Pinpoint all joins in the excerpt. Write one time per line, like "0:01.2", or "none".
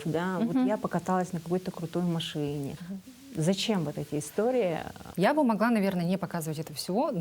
0:02.8
0:05.0